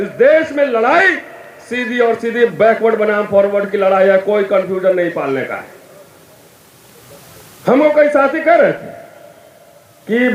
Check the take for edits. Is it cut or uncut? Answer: uncut